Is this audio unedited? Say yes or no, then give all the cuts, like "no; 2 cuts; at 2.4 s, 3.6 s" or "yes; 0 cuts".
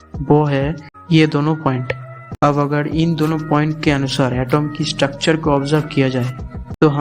yes; 0 cuts